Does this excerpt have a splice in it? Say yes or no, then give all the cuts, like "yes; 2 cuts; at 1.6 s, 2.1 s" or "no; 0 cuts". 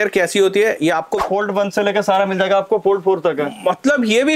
yes; 1 cut; at 1.2 s